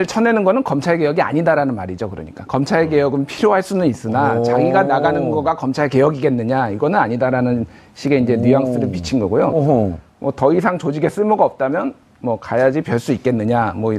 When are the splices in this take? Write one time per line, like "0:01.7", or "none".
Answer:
0:11.8